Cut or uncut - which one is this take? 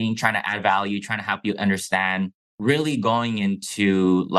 cut